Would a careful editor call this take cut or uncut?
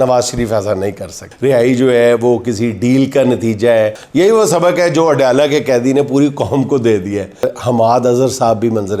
cut